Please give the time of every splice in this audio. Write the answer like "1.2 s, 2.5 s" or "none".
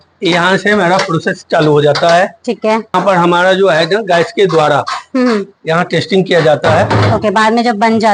none